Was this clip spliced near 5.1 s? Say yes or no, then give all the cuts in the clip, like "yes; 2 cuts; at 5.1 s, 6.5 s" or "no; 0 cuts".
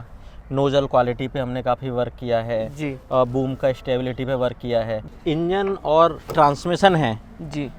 yes; 1 cut; at 5.1 s